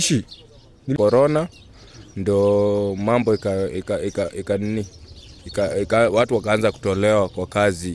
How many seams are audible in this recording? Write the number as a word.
one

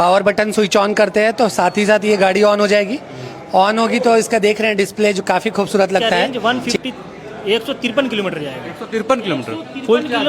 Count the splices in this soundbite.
one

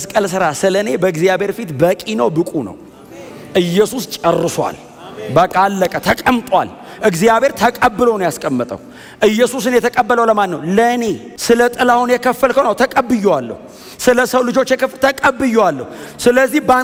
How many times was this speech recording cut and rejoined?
zero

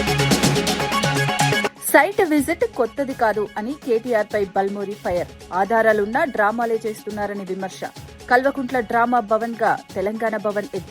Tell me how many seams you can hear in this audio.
one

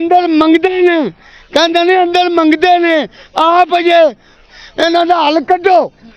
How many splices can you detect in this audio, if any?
one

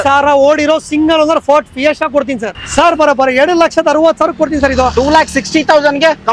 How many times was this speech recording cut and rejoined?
one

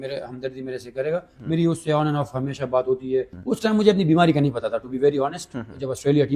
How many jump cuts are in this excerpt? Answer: one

